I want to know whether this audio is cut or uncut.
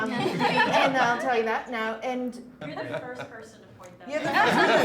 cut